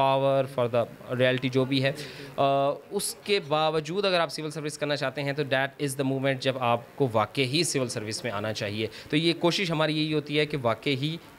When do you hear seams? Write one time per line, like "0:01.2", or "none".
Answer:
none